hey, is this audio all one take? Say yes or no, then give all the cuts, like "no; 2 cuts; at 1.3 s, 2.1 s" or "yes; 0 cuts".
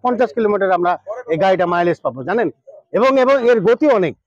yes; 0 cuts